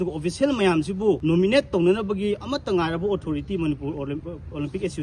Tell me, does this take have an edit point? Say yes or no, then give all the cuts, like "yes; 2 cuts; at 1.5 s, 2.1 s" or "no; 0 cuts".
yes; 1 cut; at 1.2 s